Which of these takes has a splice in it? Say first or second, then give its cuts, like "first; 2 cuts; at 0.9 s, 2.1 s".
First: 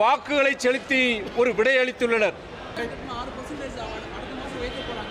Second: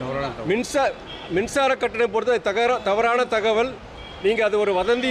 first; 1 cut; at 2.8 s